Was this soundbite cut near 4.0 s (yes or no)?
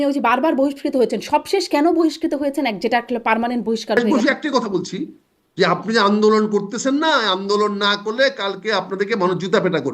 yes